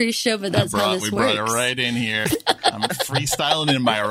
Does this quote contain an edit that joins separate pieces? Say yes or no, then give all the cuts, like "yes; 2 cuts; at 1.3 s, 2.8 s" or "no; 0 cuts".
yes; 1 cut; at 2.2 s